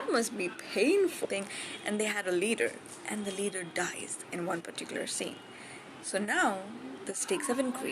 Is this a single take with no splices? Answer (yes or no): no